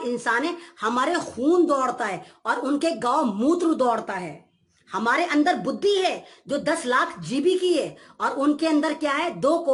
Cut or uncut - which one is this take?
uncut